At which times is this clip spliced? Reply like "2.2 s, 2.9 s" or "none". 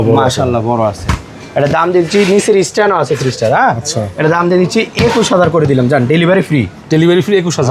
none